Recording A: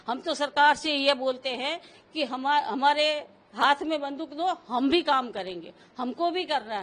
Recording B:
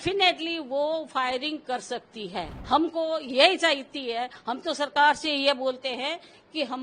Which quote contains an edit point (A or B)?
B